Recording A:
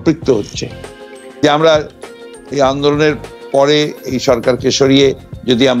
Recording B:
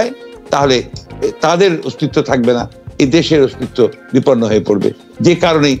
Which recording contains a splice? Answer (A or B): A